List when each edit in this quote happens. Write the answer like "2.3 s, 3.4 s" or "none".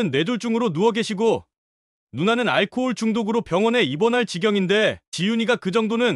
none